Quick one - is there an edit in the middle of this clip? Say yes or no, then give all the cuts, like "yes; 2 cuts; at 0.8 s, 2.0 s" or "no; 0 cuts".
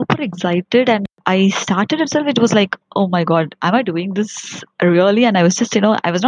yes; 1 cut; at 1.0 s